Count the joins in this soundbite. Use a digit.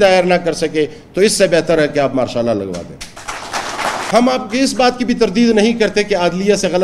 1